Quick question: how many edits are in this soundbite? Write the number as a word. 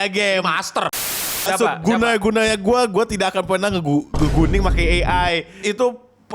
two